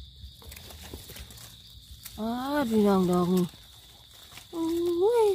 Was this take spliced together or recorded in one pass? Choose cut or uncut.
cut